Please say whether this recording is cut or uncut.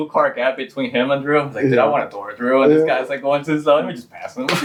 uncut